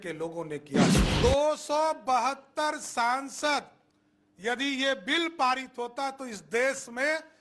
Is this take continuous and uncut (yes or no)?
no